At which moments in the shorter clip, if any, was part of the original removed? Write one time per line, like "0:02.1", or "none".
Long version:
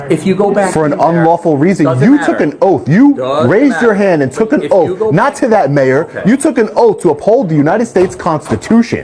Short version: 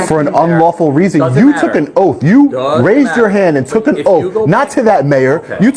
none